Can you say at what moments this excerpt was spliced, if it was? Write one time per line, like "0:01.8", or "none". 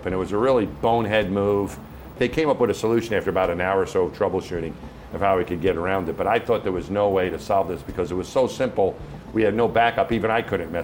0:02.1